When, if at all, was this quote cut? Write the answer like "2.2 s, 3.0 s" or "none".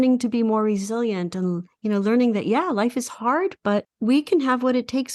3.9 s